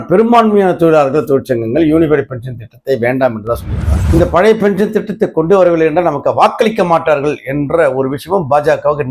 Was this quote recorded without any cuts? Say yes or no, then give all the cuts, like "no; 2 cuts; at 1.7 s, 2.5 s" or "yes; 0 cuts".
no; 1 cut; at 4.0 s